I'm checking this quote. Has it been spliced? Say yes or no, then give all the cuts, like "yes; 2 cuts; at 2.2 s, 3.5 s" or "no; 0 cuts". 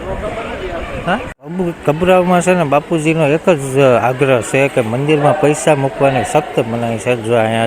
yes; 1 cut; at 1.3 s